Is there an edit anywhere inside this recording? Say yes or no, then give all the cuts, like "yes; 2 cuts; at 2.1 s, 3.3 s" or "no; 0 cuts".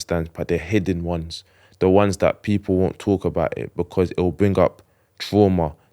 no; 0 cuts